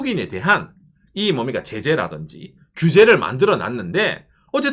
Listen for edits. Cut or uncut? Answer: uncut